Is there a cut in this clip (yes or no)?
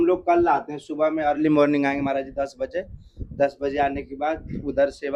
no